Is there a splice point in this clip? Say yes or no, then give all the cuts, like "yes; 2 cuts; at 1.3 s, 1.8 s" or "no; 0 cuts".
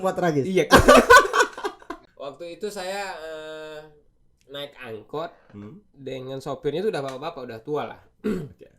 yes; 1 cut; at 2.1 s